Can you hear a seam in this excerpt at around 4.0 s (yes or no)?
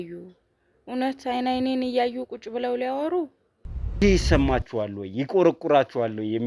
yes